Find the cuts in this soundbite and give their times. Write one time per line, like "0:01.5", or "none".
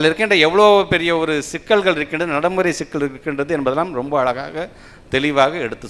none